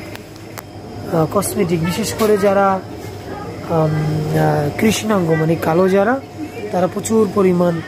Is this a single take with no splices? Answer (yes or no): yes